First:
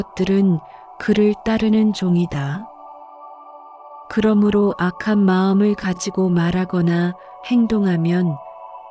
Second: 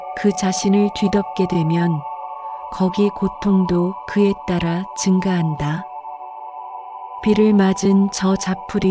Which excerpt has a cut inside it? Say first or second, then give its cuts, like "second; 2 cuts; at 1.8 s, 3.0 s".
second; 2 cuts; at 5.8 s, 7.2 s